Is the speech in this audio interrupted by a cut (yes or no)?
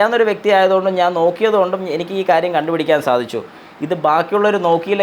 no